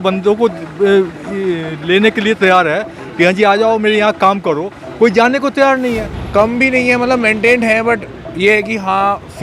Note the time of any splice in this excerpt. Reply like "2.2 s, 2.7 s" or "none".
6.1 s